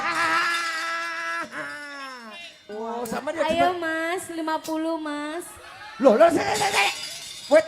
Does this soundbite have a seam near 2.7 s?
yes; 1 cut; at 2.7 s

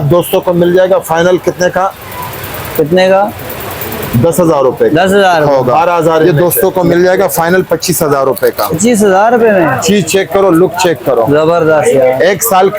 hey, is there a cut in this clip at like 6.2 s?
yes; 1 cut; at 6.2 s

